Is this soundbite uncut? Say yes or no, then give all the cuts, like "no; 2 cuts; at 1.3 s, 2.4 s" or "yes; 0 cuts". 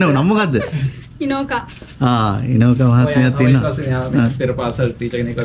yes; 0 cuts